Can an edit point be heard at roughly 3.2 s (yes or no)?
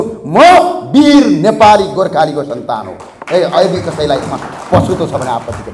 no